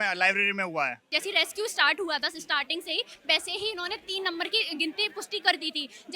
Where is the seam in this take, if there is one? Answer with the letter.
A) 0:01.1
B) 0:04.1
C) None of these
A